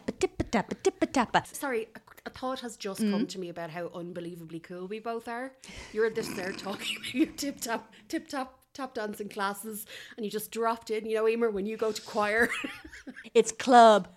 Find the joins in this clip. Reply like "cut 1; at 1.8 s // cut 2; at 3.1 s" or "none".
cut 1; at 1.5 s // cut 2; at 13.2 s